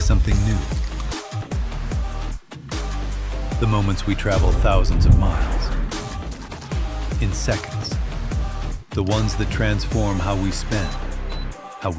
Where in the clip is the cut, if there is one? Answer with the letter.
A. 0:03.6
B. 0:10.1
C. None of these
C